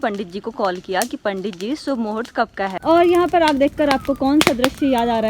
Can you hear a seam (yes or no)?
yes